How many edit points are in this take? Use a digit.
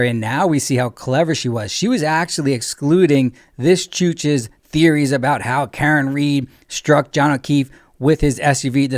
0